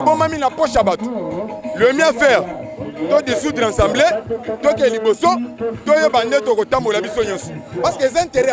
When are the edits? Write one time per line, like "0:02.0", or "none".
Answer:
none